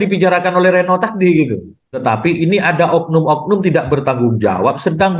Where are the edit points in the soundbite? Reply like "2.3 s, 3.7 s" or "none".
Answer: 2.0 s